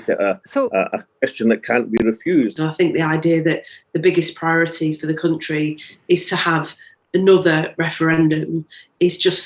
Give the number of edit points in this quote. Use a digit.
1